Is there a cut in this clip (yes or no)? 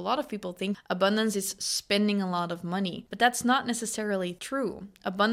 yes